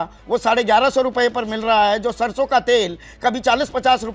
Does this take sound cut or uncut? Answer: uncut